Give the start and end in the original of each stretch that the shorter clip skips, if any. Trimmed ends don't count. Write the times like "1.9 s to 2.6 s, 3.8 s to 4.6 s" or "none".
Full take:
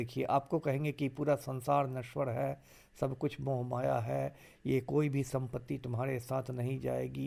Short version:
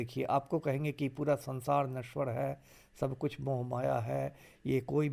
none